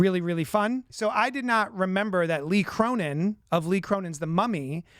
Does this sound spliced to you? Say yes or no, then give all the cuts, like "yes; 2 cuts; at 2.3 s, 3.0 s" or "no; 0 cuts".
yes; 1 cut; at 0.9 s